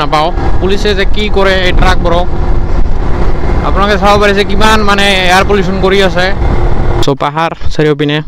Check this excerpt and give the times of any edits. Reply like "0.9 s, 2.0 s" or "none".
7.0 s